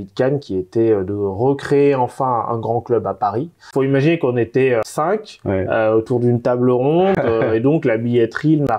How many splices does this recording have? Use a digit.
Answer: 2